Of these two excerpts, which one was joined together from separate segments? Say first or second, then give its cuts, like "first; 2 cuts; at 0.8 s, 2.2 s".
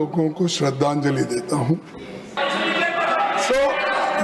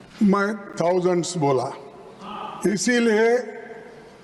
first; 1 cut; at 2.4 s